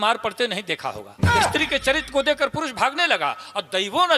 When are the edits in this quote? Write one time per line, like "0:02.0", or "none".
0:01.4